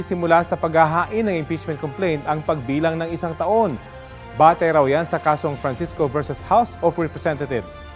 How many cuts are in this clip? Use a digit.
1